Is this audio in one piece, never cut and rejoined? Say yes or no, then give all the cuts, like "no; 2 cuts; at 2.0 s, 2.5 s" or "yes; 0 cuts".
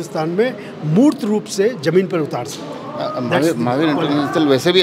yes; 0 cuts